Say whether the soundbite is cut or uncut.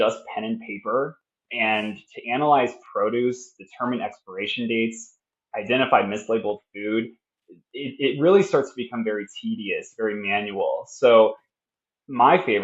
uncut